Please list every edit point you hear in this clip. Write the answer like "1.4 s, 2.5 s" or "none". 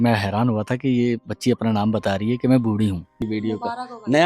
3.1 s